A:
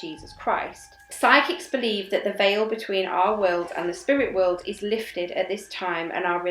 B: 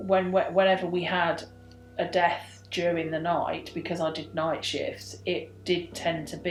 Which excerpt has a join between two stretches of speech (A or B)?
A